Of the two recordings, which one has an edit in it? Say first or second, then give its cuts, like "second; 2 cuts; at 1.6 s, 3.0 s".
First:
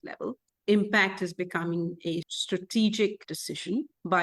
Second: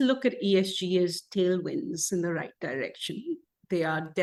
first; 1 cut; at 2.4 s